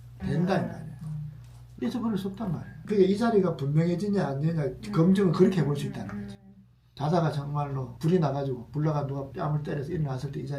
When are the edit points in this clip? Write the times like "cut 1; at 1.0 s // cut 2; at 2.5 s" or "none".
cut 1; at 1.6 s // cut 2; at 2.7 s // cut 3; at 6.8 s